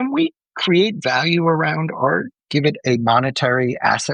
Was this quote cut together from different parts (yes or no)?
no